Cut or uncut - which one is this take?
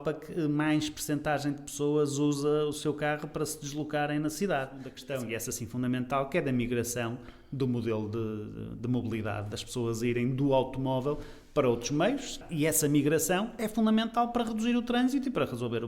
cut